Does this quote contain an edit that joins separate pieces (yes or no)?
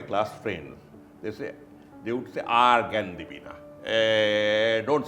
no